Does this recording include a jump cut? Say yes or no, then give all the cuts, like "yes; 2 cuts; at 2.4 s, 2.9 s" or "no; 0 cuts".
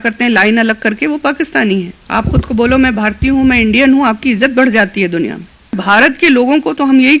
yes; 2 cuts; at 2.0 s, 5.8 s